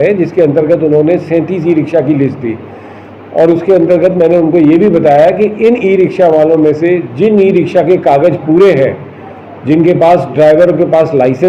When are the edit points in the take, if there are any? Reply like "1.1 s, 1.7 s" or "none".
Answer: none